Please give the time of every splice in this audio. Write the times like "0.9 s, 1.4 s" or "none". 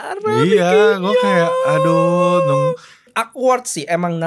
3.1 s